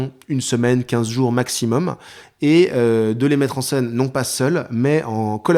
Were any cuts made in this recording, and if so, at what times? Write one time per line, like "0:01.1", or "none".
none